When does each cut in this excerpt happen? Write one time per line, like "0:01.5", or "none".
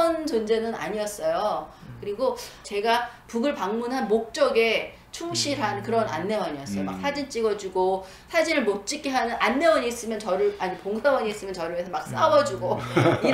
0:02.6